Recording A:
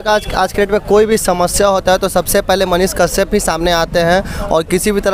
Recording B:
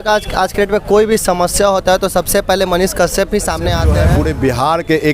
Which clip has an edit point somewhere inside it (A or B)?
B